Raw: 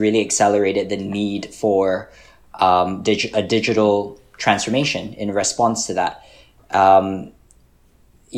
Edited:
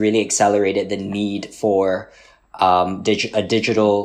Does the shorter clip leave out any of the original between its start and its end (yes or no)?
no